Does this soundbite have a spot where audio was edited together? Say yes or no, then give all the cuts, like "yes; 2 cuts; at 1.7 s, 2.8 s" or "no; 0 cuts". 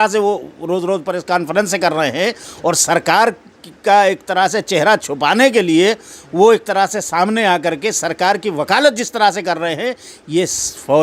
no; 0 cuts